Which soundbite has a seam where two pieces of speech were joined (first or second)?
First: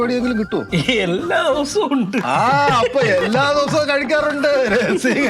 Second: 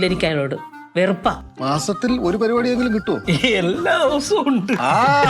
second